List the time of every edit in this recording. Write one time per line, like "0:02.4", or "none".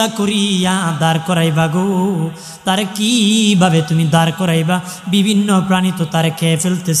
none